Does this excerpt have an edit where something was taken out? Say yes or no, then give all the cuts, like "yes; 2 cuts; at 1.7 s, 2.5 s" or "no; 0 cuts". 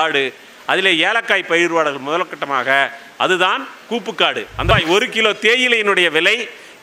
yes; 1 cut; at 4.7 s